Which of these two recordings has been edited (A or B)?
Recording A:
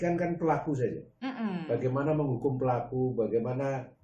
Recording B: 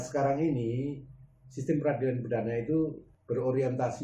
B